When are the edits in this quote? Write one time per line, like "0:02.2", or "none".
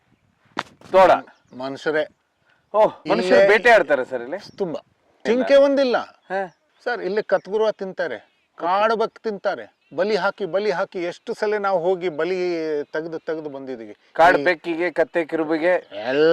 none